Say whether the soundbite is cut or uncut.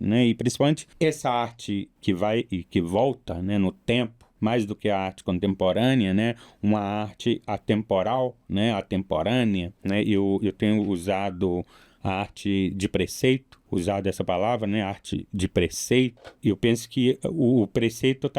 cut